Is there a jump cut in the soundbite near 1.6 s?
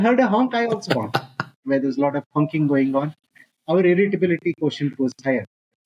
yes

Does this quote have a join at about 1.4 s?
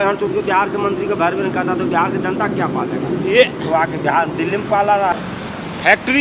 no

